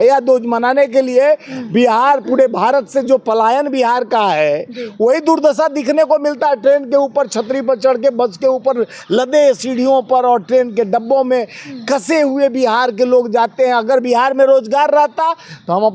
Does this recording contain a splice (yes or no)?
no